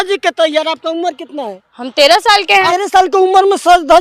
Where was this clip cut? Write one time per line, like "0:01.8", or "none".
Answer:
0:02.7